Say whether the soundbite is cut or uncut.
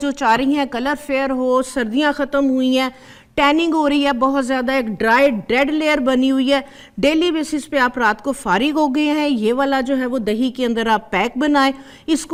uncut